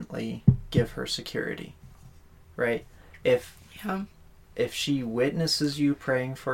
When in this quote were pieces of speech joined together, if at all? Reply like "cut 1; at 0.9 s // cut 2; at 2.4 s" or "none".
none